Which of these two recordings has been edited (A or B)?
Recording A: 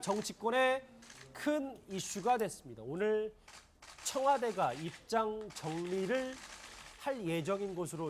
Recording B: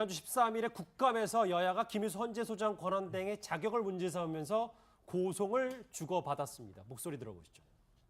B